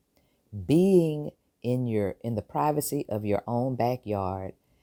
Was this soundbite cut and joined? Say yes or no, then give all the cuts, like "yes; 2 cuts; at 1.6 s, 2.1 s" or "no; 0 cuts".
no; 0 cuts